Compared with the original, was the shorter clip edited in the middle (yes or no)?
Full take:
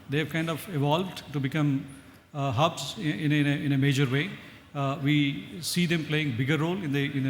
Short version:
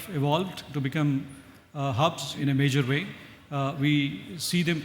yes